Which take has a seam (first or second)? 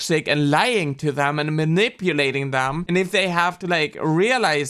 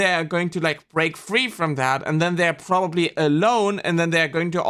first